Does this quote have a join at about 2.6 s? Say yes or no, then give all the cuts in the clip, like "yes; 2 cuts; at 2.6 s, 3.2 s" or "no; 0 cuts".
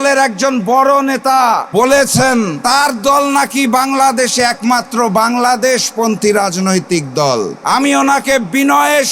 yes; 3 cuts; at 1.6 s, 2.6 s, 7.6 s